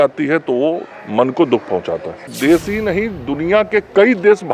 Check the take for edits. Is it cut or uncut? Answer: cut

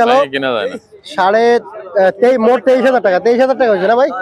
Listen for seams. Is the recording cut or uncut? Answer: uncut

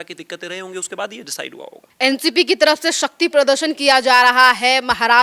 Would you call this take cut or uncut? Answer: uncut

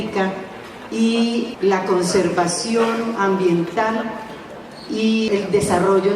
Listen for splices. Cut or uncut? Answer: cut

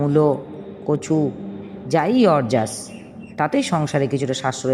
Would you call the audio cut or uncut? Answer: uncut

